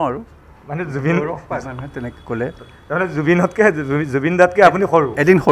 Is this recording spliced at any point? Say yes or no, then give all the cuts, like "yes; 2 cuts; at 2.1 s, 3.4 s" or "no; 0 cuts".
no; 0 cuts